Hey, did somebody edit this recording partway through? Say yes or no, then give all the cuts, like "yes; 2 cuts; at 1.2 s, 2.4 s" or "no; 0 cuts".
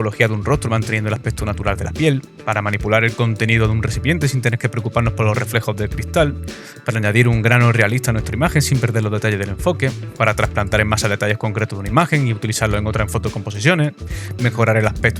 no; 0 cuts